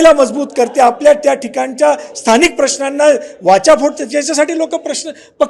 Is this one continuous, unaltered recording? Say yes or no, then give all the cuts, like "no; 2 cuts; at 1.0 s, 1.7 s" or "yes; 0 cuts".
yes; 0 cuts